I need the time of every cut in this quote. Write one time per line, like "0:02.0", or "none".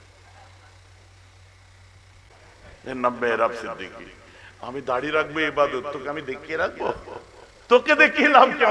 0:02.3